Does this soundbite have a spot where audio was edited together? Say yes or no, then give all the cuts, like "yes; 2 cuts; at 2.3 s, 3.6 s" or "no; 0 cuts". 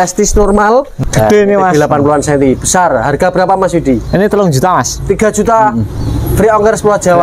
yes; 1 cut; at 0.9 s